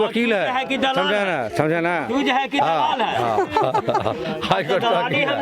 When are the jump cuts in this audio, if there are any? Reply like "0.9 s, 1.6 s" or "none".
none